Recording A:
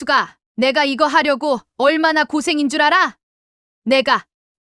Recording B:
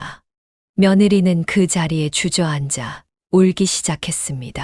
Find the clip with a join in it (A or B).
A